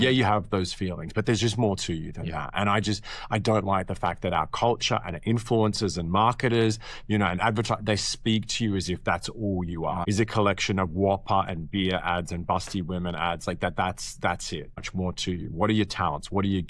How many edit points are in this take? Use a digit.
2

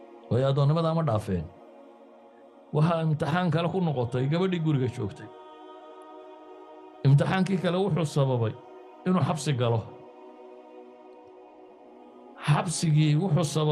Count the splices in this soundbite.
2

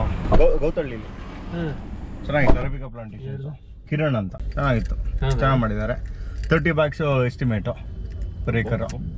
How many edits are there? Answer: 1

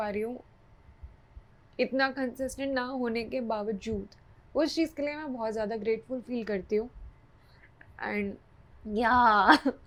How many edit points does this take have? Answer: 0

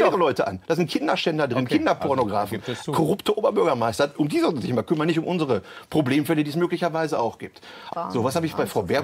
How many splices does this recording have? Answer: 1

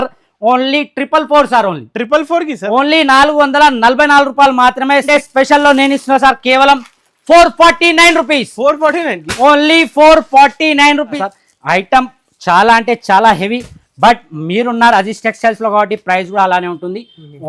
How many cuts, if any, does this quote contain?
2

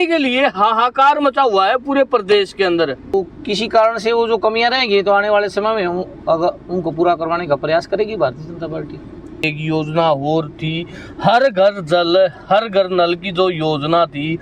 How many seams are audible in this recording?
2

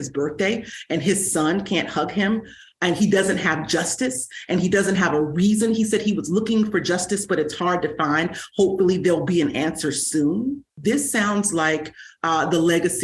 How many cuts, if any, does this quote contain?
1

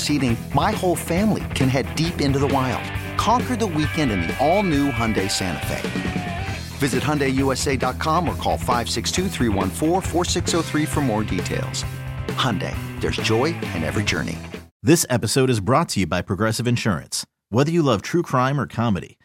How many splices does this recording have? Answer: 1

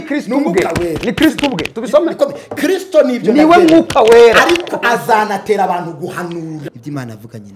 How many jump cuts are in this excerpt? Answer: 1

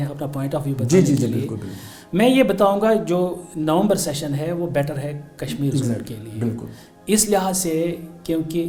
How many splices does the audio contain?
0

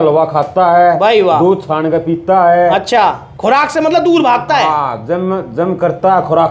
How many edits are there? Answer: 1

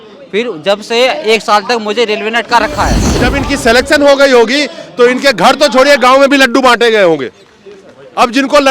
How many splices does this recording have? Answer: 1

